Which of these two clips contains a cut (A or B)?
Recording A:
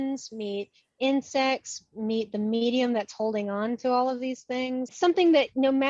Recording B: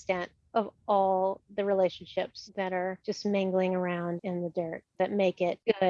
A